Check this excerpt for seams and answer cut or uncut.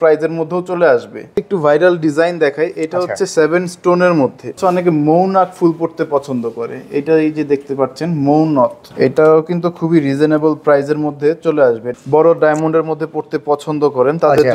cut